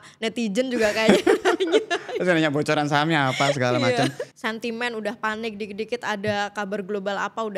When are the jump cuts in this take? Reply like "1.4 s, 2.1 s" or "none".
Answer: 4.2 s